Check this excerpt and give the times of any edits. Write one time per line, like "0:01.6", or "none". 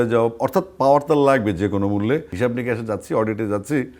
0:02.3